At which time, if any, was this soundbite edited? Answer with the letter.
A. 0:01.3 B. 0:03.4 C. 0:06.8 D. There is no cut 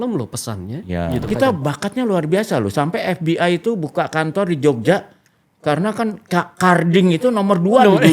A